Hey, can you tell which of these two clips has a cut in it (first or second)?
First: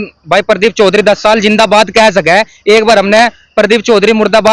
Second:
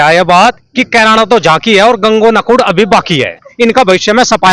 second